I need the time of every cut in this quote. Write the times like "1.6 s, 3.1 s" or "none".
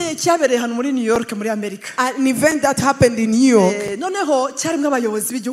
none